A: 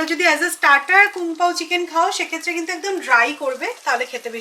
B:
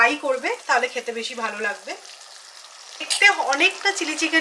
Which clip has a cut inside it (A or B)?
B